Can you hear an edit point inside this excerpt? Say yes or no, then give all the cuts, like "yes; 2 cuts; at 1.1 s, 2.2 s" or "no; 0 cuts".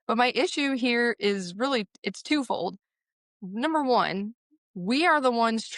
no; 0 cuts